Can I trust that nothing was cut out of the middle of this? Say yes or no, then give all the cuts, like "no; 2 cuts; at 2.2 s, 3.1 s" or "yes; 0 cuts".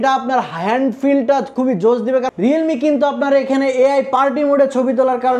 no; 1 cut; at 2.3 s